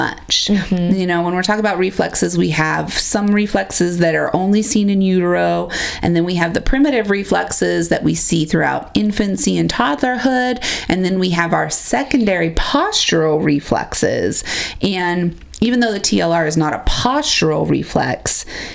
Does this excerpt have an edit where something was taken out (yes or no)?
no